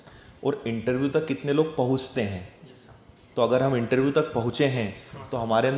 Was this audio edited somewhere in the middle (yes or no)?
no